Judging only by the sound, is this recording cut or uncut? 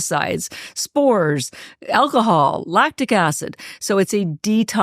uncut